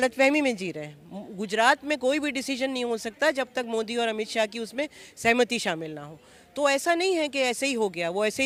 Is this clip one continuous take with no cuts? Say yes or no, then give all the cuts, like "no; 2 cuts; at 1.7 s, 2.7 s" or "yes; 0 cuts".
yes; 0 cuts